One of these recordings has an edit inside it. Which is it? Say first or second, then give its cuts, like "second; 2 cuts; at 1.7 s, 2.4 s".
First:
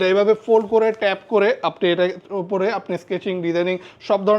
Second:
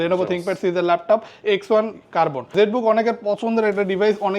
second; 1 cut; at 2.4 s